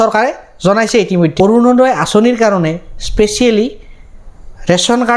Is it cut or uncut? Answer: cut